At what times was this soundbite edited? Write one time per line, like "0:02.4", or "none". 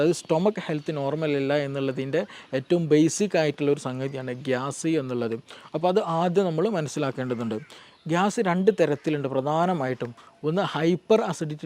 0:07.8